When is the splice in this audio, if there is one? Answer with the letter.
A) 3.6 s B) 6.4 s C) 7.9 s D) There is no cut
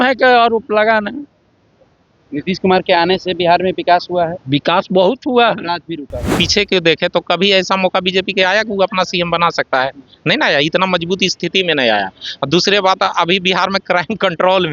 B